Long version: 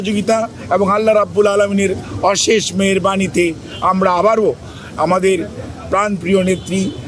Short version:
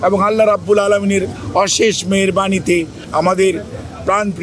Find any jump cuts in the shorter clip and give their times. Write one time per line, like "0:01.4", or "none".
0:03.0